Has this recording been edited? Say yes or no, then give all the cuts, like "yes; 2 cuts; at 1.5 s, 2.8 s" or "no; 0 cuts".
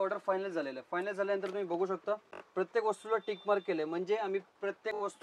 yes; 1 cut; at 2.3 s